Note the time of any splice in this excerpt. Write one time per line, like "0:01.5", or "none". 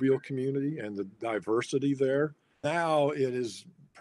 0:02.6